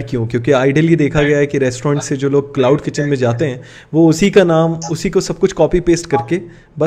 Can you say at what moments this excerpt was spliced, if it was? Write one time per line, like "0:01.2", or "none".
none